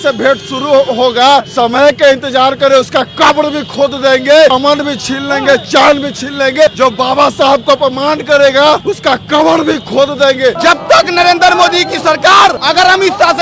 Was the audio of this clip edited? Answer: yes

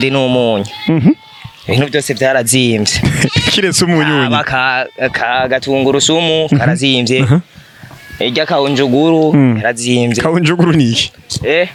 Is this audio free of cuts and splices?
yes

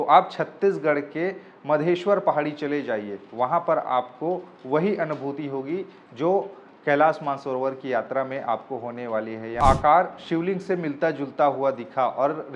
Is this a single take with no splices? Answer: no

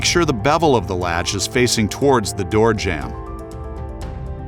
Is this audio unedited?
no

